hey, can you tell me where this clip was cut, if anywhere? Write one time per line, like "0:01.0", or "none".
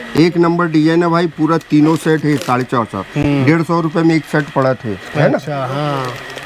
none